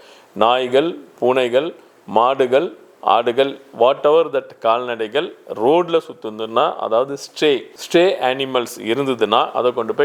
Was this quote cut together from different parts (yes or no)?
no